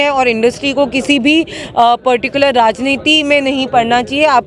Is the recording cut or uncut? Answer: uncut